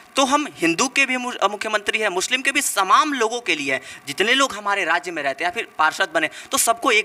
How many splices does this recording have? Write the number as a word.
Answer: zero